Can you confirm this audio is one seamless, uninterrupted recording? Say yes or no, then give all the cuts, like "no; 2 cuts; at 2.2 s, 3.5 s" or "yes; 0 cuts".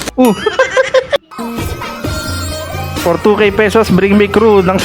no; 1 cut; at 1.2 s